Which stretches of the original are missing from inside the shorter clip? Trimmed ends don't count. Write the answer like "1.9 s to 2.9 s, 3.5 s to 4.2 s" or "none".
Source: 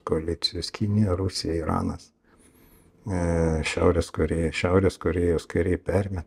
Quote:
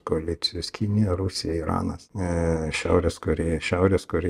2.1 s to 3.0 s